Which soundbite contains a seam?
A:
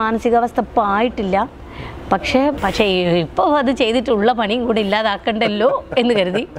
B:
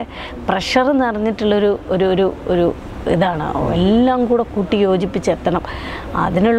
A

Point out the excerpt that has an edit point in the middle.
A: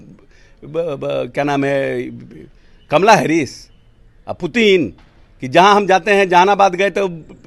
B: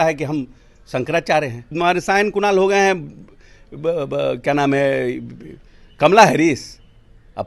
B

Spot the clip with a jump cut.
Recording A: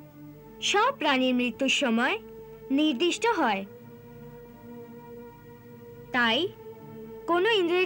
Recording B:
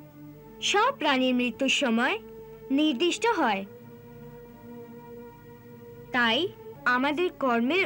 B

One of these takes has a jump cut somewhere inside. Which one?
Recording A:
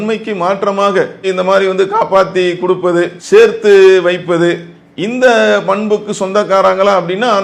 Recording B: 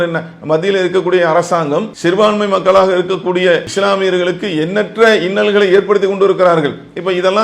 B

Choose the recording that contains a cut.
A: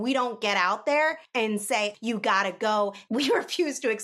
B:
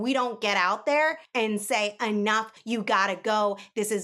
A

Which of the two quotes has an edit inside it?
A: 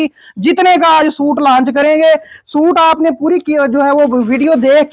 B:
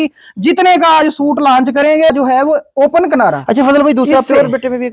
B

